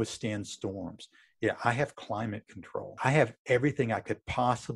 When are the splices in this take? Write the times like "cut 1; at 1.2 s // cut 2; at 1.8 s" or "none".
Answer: cut 1; at 3.0 s